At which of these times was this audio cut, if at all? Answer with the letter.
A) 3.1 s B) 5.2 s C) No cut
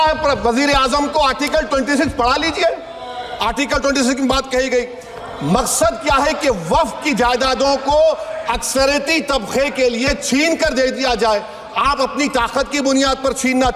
C